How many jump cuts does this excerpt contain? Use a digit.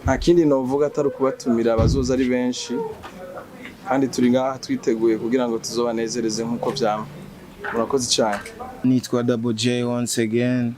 1